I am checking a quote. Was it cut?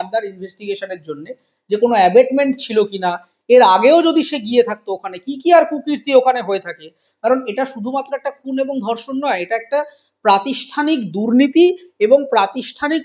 no; 0 cuts

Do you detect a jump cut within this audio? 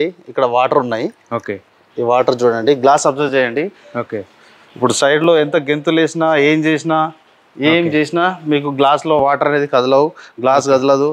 no; 0 cuts

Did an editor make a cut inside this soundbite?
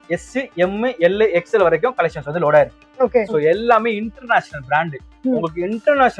yes; 1 cut; at 3.2 s

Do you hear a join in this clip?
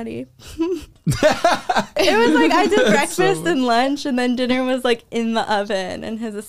yes; 1 cut; at 2.0 s

